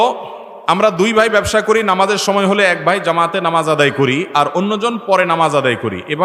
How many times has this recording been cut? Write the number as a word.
zero